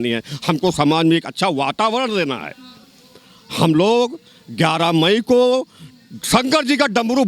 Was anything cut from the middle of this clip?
no; 0 cuts

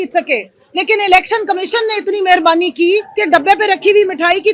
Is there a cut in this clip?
yes; 1 cut; at 3.1 s

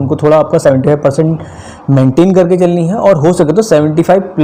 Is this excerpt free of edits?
yes; 0 cuts

